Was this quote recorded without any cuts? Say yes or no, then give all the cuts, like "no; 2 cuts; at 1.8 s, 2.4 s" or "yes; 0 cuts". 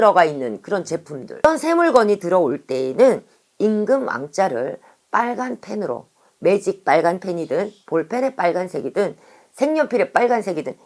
no; 1 cut; at 1.4 s